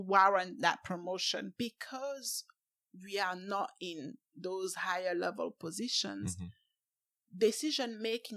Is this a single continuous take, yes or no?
no